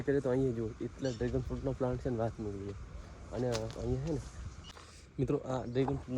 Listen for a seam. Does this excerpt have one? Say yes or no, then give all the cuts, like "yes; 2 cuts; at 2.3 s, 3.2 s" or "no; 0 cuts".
yes; 1 cut; at 4.7 s